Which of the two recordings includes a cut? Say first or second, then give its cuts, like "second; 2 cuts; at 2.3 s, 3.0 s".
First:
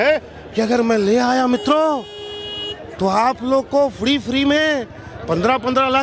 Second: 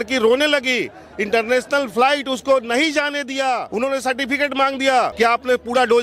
second; 2 cuts; at 3.7 s, 5.1 s